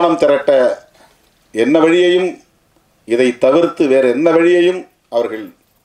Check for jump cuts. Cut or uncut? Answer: uncut